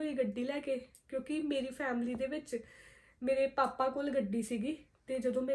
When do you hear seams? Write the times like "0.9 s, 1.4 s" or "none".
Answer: none